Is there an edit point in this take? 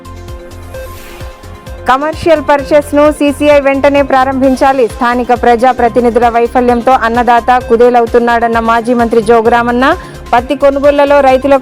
yes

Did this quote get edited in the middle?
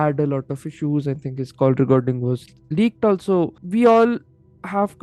yes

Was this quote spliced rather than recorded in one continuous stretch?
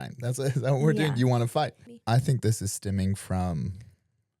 yes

